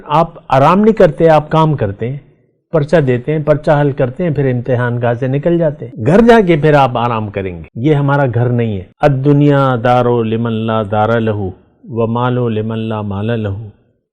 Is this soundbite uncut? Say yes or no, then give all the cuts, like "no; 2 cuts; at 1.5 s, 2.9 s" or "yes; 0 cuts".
no; 3 cuts; at 5.9 s, 7.6 s, 8.8 s